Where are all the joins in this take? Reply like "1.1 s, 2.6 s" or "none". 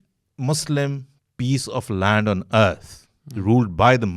none